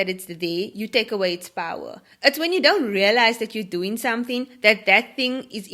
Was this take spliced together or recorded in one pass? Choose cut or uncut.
uncut